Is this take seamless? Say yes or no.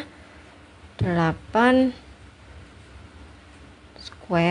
yes